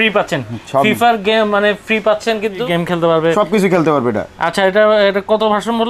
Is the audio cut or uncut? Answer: cut